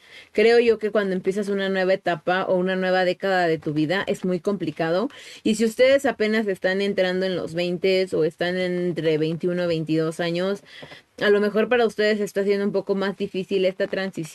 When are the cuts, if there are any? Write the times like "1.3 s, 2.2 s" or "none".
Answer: none